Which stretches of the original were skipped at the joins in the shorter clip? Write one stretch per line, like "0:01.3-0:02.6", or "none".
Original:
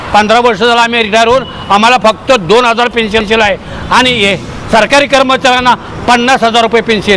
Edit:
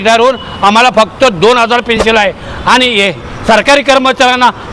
0:03.1-0:03.2